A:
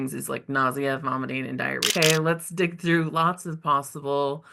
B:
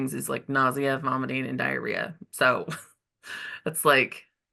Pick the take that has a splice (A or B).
A